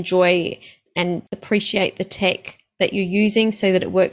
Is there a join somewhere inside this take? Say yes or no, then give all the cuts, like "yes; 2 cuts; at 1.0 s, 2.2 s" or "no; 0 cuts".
yes; 1 cut; at 1.4 s